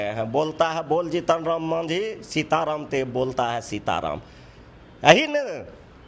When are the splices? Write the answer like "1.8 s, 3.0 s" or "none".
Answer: none